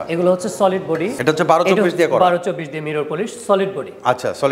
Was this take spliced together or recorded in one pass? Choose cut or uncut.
cut